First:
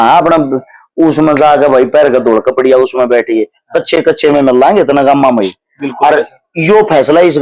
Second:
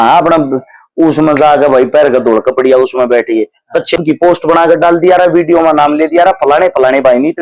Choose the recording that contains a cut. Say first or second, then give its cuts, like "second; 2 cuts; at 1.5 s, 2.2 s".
second; 1 cut; at 4.0 s